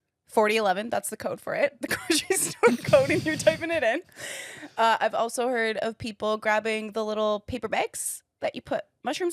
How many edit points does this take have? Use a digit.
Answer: 0